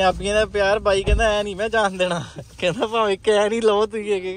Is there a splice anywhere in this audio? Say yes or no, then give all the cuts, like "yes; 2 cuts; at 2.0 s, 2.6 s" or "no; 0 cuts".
no; 0 cuts